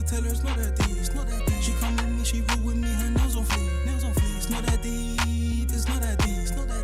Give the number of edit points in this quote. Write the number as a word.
zero